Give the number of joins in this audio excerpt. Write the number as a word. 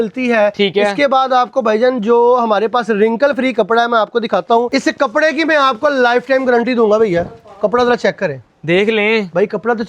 one